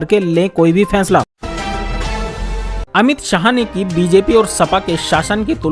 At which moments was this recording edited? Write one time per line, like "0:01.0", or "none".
0:01.4
0:02.8